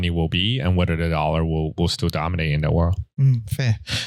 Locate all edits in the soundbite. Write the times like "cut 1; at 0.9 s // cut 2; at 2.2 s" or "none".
none